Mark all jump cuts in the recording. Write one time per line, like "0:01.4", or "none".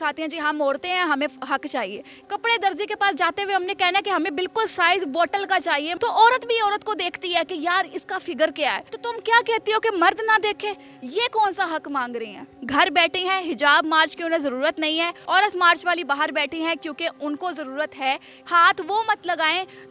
0:02.1
0:05.9
0:08.9
0:12.5
0:15.2
0:18.4

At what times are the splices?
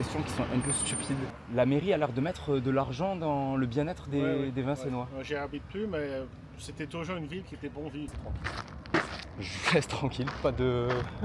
0:01.3
0:08.2

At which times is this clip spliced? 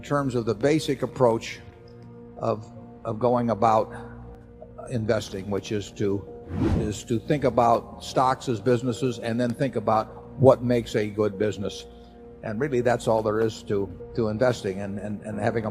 0:14.0

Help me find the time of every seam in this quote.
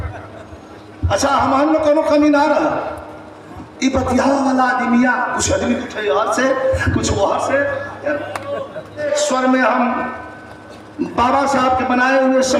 0:08.9

